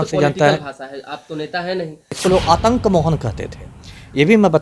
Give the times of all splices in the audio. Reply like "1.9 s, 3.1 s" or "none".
2.2 s